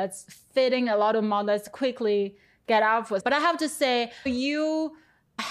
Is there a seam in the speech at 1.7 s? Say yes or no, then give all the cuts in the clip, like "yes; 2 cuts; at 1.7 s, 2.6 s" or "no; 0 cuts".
no; 2 cuts; at 3.2 s, 4.3 s